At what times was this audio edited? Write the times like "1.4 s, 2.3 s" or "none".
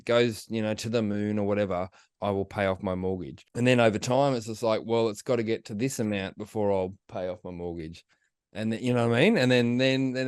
3.4 s